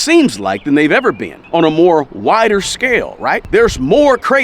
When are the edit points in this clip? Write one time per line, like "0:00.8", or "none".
0:01.3
0:03.4